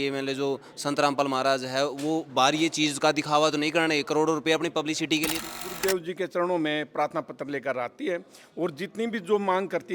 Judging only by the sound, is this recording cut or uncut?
cut